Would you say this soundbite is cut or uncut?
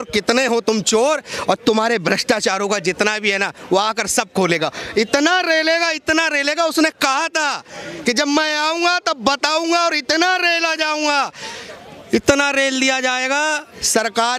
uncut